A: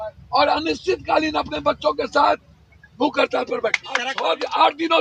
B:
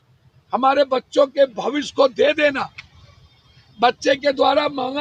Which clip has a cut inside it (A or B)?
A